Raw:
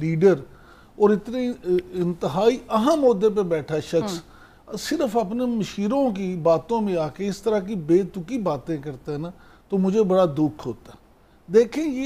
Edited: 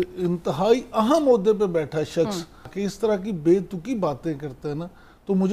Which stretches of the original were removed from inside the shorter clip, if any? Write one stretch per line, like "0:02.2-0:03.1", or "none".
0:04.5-0:07.1

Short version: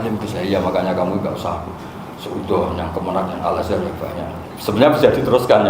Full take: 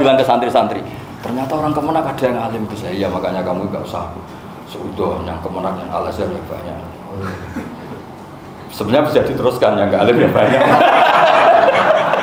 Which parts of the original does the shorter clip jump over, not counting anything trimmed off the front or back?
0:06.9-0:08.6

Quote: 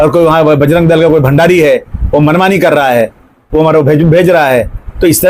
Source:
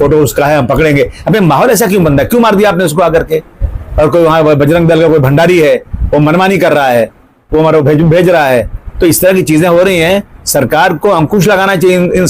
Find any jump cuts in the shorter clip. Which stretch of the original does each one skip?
none

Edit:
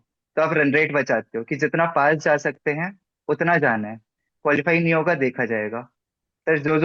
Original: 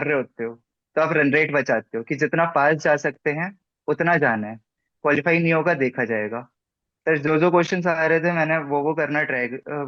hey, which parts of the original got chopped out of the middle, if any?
none

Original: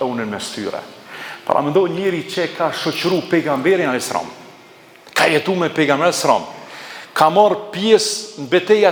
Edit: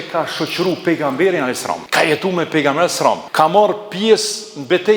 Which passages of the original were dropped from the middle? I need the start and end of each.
0:04.3-0:05.1
0:06.5-0:07.1

